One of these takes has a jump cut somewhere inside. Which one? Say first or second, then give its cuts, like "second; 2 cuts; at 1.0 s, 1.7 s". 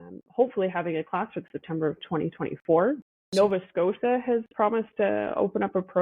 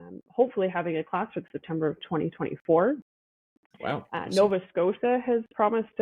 first; 1 cut; at 3.2 s